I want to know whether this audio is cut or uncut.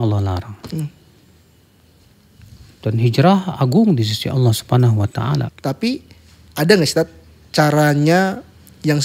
cut